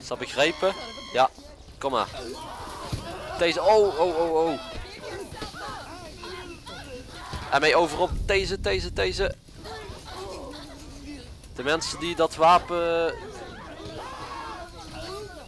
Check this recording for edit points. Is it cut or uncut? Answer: uncut